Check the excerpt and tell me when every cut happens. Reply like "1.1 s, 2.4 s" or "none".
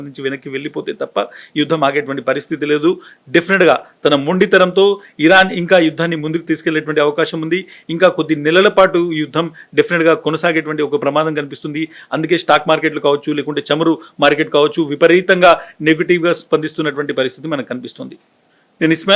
none